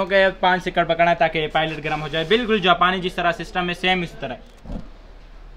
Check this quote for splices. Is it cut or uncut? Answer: cut